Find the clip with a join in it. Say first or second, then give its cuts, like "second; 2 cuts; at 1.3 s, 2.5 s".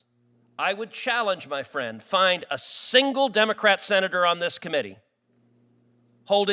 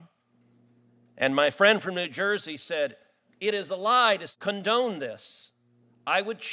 second; 1 cut; at 4.3 s